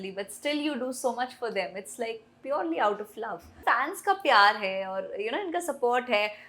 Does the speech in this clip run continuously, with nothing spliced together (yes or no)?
no